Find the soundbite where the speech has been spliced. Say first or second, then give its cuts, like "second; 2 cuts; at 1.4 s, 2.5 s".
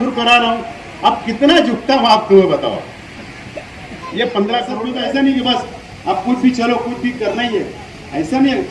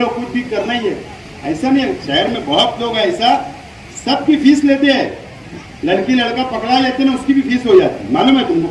first; 1 cut; at 4.8 s